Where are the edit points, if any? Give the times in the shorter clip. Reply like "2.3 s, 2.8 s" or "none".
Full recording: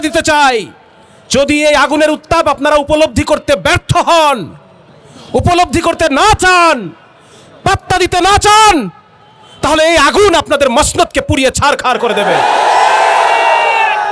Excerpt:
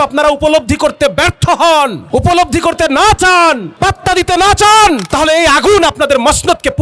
2.0 s, 3.7 s, 5.1 s